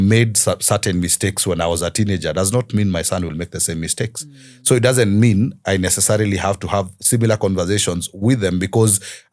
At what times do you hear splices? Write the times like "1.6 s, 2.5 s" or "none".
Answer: none